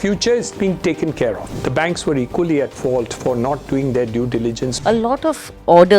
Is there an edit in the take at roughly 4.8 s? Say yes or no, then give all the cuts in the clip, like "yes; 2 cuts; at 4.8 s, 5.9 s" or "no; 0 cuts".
yes; 2 cuts; at 1.5 s, 4.8 s